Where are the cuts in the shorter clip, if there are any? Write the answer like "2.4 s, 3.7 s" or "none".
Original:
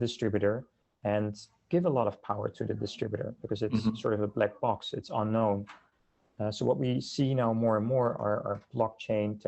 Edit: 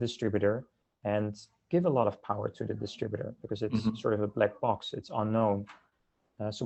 none